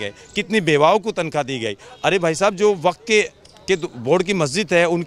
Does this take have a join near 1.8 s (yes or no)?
no